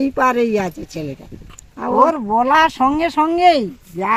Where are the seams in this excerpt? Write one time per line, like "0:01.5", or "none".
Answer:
0:02.0